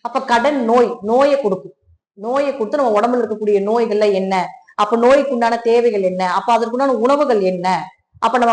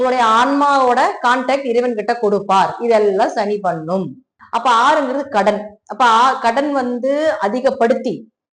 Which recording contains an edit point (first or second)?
second